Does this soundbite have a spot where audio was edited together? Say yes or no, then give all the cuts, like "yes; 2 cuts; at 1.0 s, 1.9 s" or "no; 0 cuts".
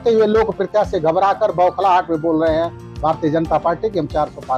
no; 0 cuts